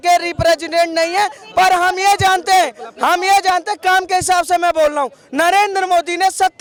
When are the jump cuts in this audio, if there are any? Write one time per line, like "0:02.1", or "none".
none